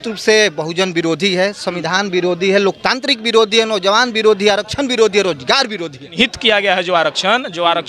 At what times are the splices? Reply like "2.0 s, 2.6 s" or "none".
6.1 s